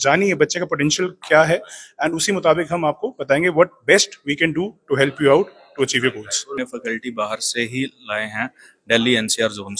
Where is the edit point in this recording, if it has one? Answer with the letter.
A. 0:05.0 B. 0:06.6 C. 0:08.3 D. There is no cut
B